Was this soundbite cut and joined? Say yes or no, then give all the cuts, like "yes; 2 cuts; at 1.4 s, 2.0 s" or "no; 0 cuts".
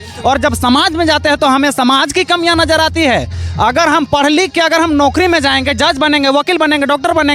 no; 0 cuts